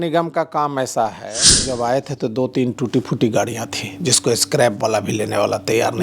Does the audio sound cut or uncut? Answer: cut